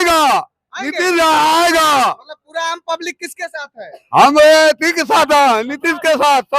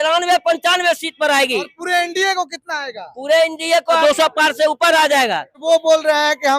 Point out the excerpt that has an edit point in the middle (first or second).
second